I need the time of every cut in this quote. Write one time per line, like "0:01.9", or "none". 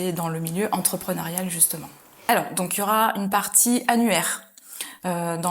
0:02.1